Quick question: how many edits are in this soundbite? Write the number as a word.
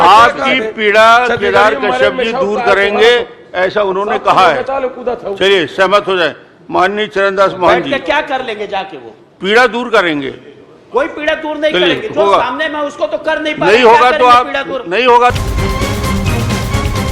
one